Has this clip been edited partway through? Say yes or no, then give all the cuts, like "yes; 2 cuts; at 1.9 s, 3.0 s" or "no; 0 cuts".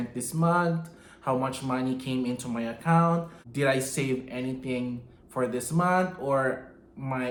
no; 0 cuts